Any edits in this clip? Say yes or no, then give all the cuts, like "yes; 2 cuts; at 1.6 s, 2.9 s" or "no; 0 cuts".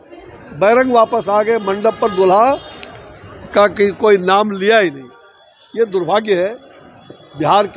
no; 0 cuts